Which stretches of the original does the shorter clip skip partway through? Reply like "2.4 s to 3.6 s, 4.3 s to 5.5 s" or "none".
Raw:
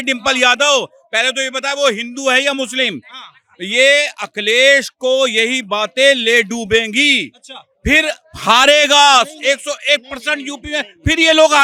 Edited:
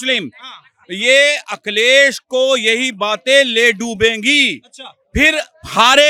none